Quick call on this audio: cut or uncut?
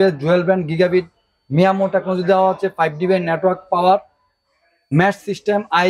uncut